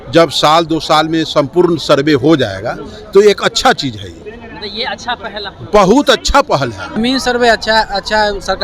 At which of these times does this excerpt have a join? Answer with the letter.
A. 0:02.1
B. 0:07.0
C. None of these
B